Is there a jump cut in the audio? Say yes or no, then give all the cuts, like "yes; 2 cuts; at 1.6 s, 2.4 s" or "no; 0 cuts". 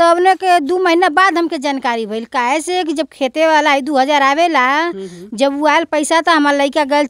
no; 0 cuts